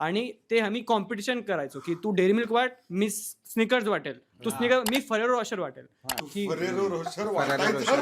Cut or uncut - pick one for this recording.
cut